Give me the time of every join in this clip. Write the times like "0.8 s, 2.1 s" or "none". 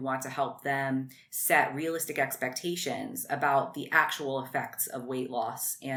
none